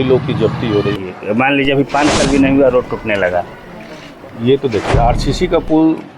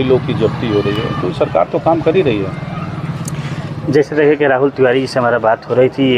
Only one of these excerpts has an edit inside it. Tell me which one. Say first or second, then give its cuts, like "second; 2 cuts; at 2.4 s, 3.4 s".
first; 1 cut; at 1.0 s